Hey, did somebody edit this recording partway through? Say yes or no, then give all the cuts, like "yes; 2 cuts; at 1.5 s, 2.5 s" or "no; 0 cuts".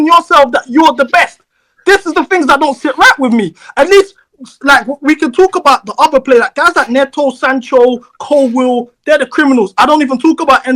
no; 0 cuts